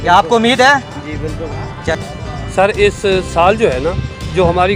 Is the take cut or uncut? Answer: cut